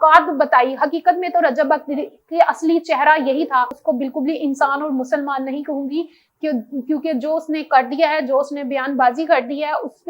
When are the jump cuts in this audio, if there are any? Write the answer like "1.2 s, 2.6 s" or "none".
3.7 s